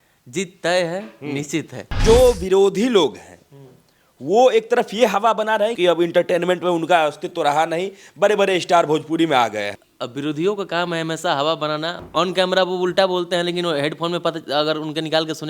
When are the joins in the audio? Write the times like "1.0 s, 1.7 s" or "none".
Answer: 2.0 s, 5.8 s, 9.8 s, 12.0 s